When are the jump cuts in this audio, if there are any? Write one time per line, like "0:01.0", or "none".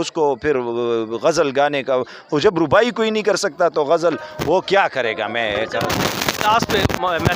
none